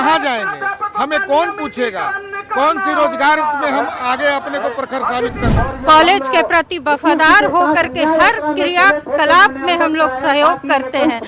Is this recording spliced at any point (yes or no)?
yes